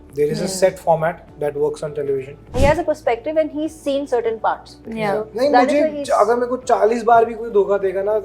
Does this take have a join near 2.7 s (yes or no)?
yes